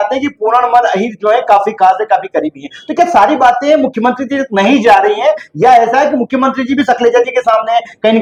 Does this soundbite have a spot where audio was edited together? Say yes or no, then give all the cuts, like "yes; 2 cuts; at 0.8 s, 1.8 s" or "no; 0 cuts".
no; 0 cuts